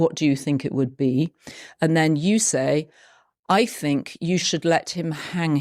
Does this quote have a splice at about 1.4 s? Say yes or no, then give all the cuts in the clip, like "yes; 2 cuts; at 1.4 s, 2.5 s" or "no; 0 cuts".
yes; 1 cut; at 1.4 s